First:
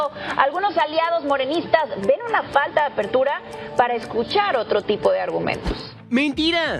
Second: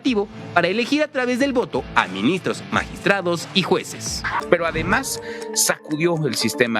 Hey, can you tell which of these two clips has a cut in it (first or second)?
second